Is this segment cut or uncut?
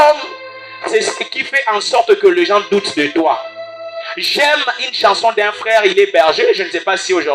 uncut